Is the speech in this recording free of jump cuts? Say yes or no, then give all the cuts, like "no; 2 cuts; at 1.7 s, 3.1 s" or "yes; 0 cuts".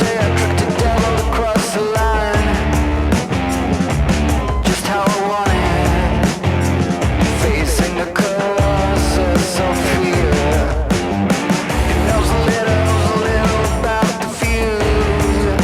yes; 0 cuts